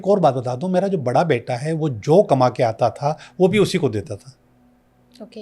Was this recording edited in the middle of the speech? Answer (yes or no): no